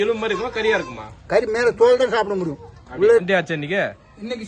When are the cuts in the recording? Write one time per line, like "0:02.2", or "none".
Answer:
0:03.2